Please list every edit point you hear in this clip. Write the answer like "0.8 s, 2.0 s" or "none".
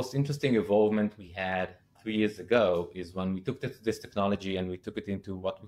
none